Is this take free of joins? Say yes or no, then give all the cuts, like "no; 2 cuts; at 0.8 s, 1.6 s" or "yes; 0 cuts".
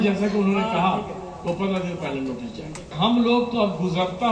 no; 1 cut; at 2.9 s